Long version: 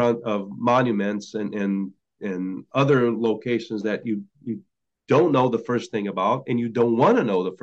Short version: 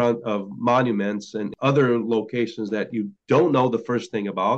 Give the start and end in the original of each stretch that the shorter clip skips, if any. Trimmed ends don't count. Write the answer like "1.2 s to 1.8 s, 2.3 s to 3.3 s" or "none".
1.5 s to 2.6 s, 4.3 s to 4.9 s